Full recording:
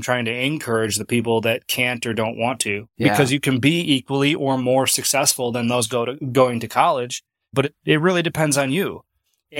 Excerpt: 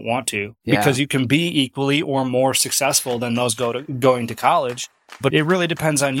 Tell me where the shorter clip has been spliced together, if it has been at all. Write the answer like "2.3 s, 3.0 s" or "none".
5.3 s